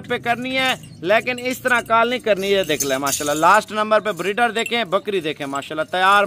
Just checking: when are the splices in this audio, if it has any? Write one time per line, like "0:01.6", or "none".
none